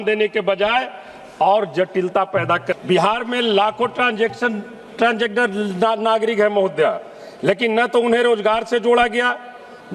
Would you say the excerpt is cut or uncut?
cut